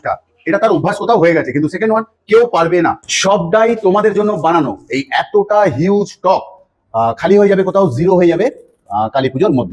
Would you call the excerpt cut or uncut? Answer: cut